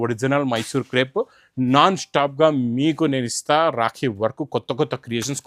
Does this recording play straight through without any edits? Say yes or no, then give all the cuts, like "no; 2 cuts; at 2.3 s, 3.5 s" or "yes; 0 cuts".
yes; 0 cuts